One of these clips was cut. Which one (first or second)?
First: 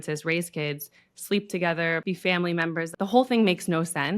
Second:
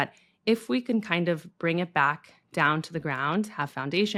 first